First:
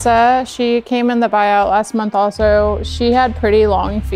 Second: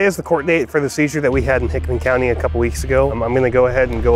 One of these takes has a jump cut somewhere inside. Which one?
second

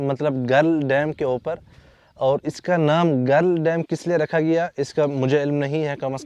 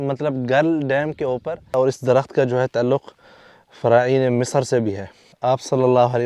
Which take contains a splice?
second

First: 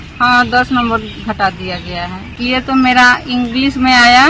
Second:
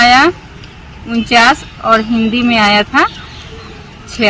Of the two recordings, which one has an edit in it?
first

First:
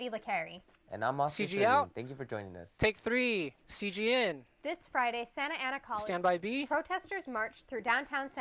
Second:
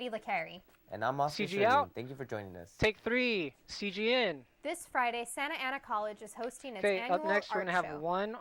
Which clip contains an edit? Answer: first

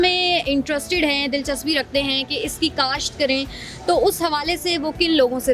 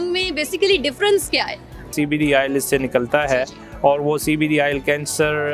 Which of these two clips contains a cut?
second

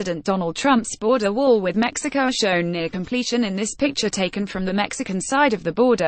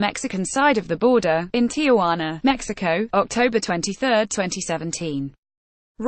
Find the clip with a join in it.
first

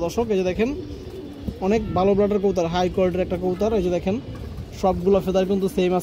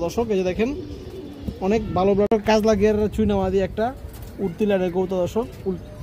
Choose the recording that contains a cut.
second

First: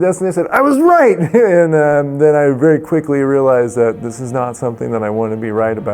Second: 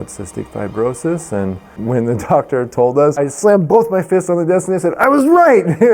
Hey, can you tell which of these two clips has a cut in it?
second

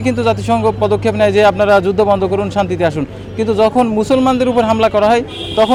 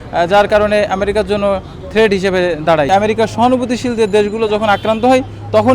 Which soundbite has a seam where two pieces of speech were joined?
second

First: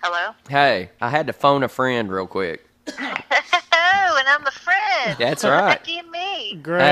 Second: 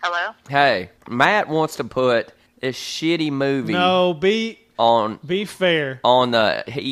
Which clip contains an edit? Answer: second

